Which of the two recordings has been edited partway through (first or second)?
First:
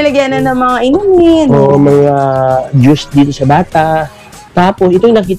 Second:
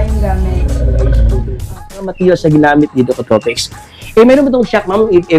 second